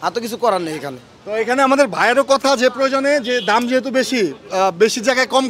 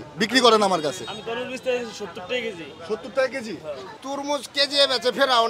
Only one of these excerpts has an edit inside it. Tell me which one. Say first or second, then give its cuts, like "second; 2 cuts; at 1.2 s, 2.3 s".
second; 1 cut; at 3.9 s